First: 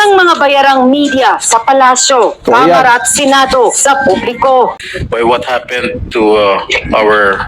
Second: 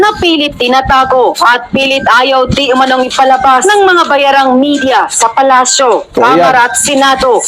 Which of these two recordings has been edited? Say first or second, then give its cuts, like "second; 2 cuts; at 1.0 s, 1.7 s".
first; 1 cut; at 4.8 s